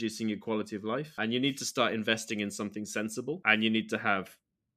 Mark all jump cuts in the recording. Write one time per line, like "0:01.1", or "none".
0:01.2
0:03.4